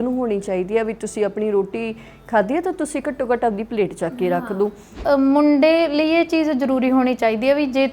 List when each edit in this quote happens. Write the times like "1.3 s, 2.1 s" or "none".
5.0 s